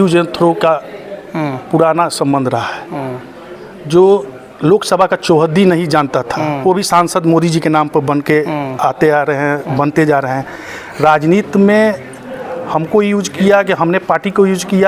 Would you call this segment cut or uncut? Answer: uncut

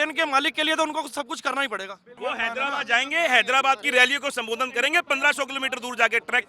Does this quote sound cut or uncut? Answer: cut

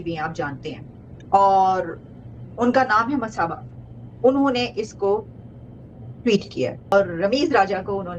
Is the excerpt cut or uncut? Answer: cut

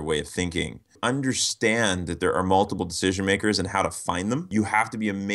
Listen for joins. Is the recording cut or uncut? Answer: cut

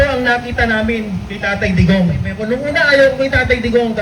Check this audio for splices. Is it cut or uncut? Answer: cut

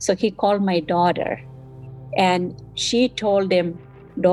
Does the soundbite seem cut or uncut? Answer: uncut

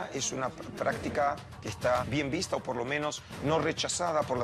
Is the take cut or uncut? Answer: cut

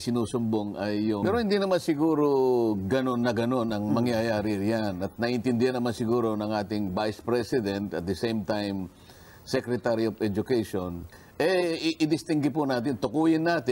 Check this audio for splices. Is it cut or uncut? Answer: cut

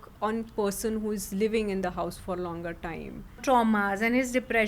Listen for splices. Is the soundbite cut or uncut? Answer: cut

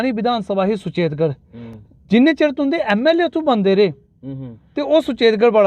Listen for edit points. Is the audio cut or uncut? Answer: uncut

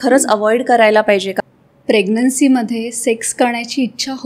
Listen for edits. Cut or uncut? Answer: cut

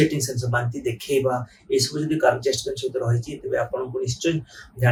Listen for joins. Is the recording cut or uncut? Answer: uncut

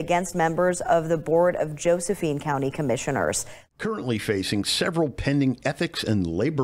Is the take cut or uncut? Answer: cut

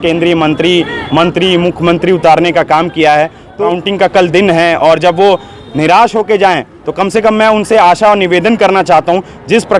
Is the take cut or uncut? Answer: cut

